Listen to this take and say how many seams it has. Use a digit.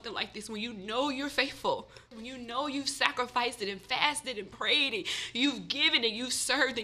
1